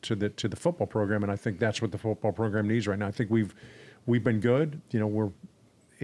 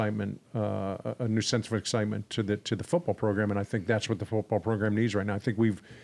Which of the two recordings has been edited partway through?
first; 1 cut; at 4.8 s

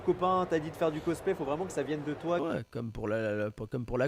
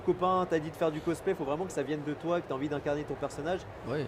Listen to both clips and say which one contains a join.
first; 1 cut; at 2.4 s

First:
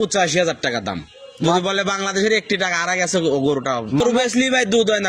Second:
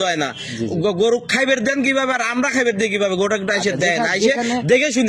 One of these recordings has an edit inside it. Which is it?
first; 1 cut; at 4.0 s

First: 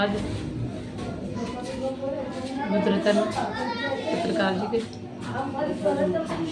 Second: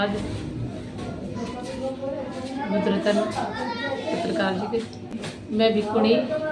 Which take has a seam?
second; 1 cut; at 5.1 s

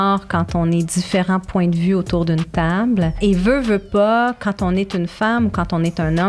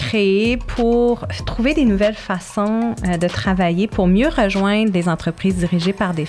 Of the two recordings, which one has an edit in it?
first; 1 cut; at 3.2 s

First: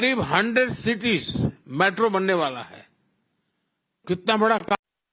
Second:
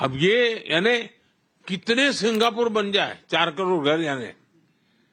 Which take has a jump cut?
first; 1 cut; at 1.5 s

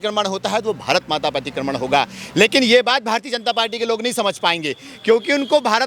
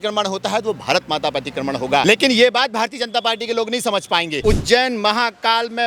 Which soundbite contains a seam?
second; 2 cuts; at 2.0 s, 4.4 s

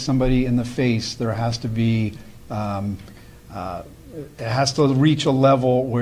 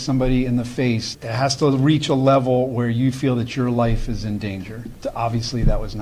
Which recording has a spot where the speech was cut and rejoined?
second; 2 cuts; at 1.1 s, 4.9 s

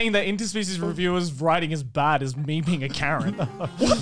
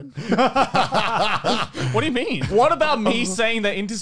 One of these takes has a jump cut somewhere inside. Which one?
second; 1 cut; at 2.4 s

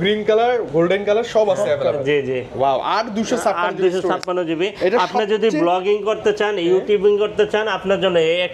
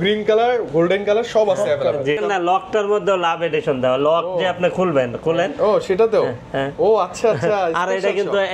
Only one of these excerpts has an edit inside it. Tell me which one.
second; 1 cut; at 2.2 s

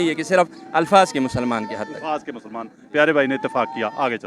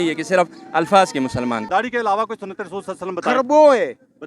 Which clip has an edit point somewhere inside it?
second; 1 cut; at 1.7 s

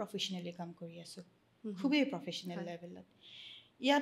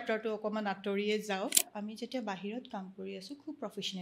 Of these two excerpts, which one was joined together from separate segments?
second; 1 cut; at 1.7 s

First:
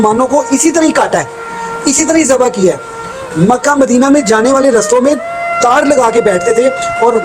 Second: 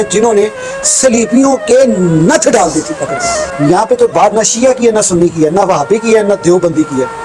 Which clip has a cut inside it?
second; 1 cut; at 3.4 s

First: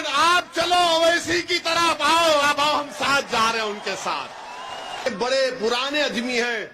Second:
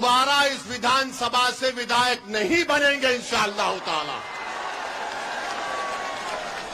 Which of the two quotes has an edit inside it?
first; 1 cut; at 5.0 s

